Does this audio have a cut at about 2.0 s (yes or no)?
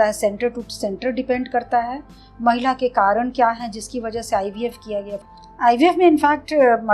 no